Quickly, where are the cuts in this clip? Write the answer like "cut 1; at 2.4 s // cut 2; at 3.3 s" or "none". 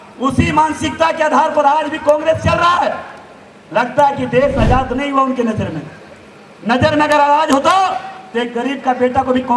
none